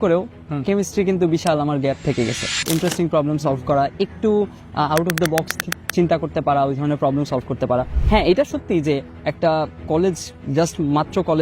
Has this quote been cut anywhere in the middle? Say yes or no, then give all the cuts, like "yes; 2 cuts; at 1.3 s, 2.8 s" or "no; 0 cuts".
yes; 2 cuts; at 2.7 s, 8.0 s